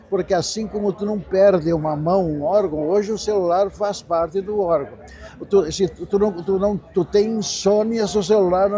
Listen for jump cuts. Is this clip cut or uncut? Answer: uncut